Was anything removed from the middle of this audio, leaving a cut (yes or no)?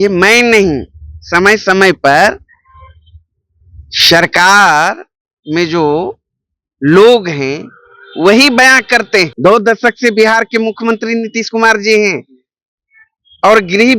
yes